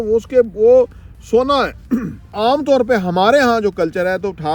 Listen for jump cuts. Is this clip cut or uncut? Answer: cut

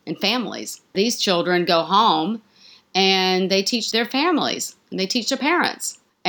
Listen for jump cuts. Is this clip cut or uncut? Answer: cut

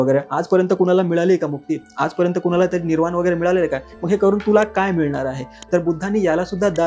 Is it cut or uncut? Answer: uncut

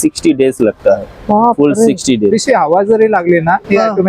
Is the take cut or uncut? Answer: cut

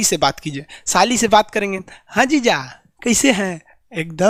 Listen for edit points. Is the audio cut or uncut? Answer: uncut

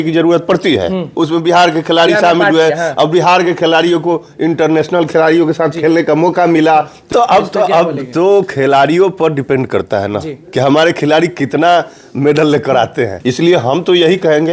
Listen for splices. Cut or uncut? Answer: cut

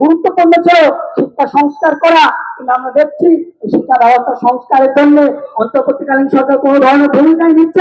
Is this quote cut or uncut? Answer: uncut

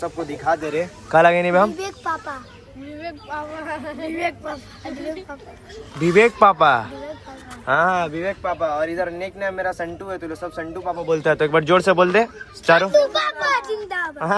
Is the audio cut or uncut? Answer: uncut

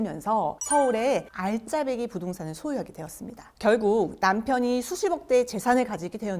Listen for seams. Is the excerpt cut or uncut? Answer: cut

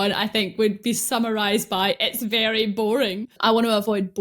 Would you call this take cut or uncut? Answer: cut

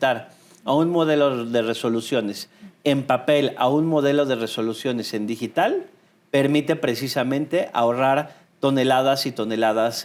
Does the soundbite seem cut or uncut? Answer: uncut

